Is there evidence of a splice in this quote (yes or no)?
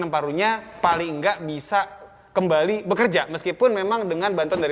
no